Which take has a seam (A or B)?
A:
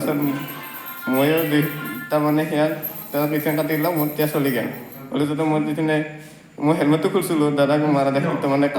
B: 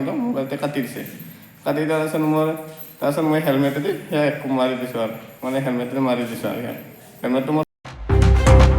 B